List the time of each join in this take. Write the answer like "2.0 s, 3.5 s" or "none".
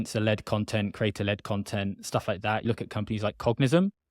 2.6 s